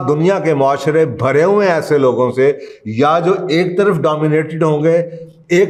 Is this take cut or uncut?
uncut